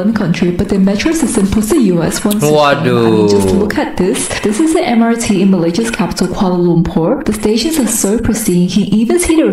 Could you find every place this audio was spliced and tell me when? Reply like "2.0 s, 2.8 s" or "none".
none